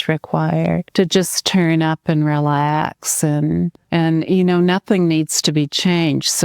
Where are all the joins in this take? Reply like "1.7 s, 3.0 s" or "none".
0.9 s, 3.8 s